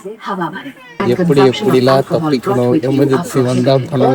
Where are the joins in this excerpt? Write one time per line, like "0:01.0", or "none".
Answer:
0:01.0